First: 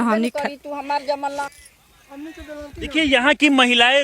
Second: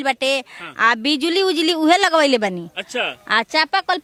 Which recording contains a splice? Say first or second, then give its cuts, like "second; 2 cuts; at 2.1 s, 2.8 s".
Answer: first; 1 cut; at 1.5 s